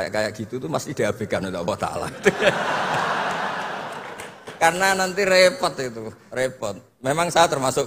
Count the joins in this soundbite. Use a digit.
1